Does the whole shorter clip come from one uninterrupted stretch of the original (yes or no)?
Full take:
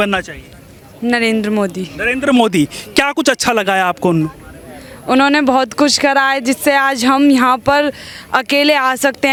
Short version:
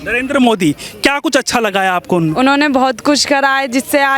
no